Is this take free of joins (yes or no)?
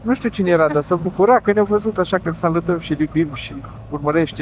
yes